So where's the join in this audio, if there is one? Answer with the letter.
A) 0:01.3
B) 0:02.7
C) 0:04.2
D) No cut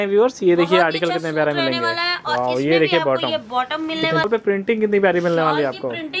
C